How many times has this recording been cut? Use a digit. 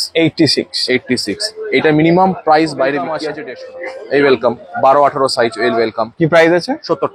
1